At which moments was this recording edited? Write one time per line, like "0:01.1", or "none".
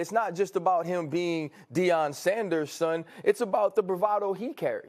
none